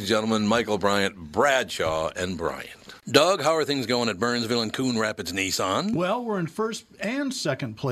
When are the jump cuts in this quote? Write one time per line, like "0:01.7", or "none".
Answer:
0:03.0